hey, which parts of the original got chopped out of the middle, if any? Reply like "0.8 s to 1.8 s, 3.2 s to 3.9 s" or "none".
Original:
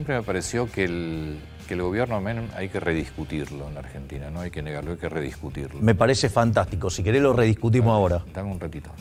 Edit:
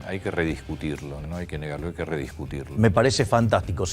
3.7 s to 4.3 s